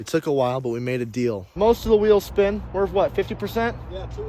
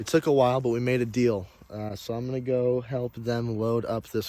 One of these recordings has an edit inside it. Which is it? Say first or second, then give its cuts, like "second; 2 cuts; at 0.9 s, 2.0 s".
first; 1 cut; at 1.4 s